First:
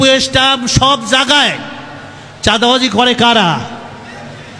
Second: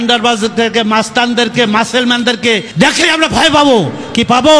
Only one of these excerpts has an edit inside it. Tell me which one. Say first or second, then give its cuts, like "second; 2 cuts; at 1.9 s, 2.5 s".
second; 1 cut; at 2.7 s